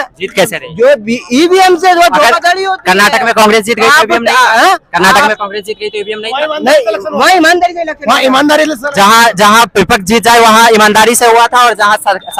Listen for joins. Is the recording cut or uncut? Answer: uncut